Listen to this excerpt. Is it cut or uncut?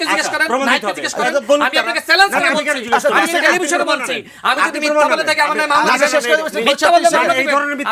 uncut